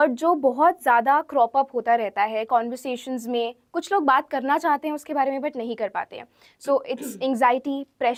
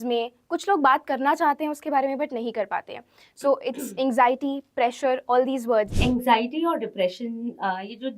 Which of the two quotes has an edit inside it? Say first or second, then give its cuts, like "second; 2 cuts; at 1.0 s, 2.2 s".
second; 1 cut; at 5.9 s